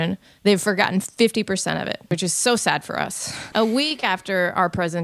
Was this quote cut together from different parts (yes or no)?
yes